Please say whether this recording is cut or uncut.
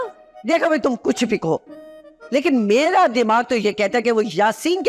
uncut